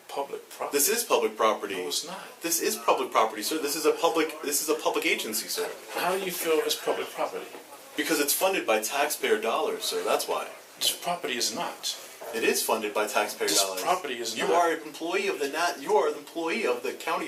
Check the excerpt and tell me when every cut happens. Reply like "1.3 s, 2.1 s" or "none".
none